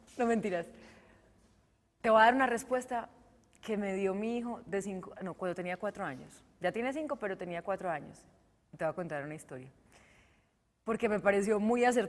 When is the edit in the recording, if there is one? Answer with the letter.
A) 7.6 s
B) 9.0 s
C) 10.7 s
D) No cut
A